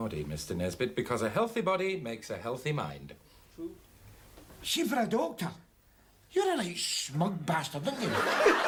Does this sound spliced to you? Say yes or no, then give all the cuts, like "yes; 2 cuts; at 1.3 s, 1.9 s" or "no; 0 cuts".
no; 0 cuts